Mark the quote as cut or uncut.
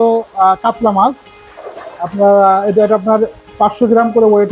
uncut